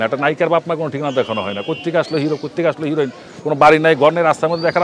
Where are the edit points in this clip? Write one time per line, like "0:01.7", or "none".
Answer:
none